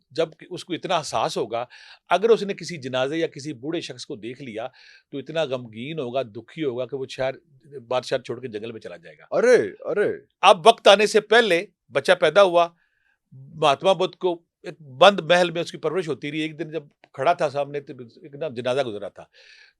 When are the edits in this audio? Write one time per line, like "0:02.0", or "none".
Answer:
none